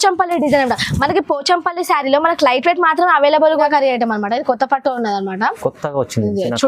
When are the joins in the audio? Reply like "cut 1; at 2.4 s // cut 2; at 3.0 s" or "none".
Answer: cut 1; at 3.6 s